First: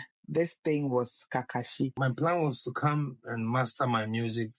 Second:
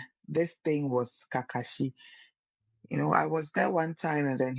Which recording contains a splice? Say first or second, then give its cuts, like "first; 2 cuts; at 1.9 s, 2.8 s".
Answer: first; 1 cut; at 1.9 s